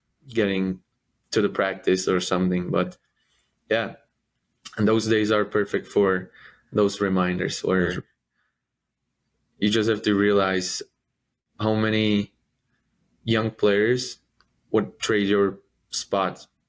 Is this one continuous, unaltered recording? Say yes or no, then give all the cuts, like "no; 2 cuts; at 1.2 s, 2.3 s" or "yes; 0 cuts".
yes; 0 cuts